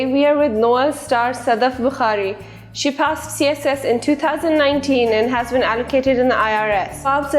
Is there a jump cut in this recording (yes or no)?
no